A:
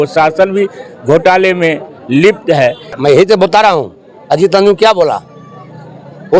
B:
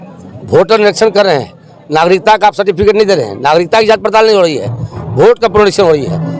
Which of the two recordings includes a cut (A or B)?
A